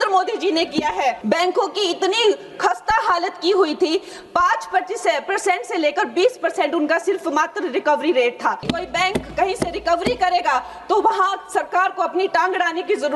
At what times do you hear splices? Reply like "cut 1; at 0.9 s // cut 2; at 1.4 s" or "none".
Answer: cut 1; at 1.2 s // cut 2; at 8.7 s